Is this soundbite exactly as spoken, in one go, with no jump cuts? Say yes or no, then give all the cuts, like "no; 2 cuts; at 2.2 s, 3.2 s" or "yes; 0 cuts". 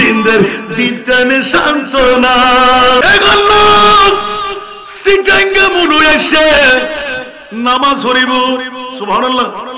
no; 1 cut; at 3.1 s